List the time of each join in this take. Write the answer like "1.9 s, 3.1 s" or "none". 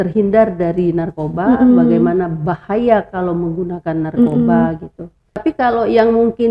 5.4 s